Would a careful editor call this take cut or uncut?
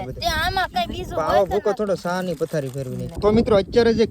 cut